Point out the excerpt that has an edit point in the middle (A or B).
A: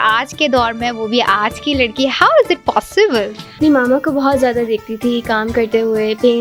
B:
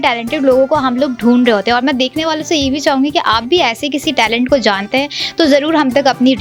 A